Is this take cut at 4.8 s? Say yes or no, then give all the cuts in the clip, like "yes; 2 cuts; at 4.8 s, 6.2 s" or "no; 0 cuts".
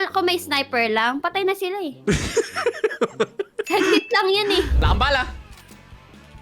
yes; 1 cut; at 4.8 s